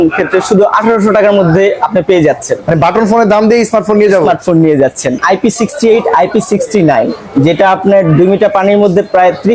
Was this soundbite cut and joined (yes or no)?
yes